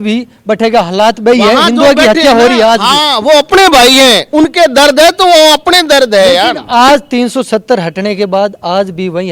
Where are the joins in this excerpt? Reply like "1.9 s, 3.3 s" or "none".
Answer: none